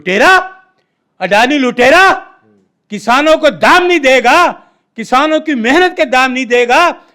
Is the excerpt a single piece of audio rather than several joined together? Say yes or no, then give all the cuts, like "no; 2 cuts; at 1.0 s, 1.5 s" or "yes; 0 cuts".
yes; 0 cuts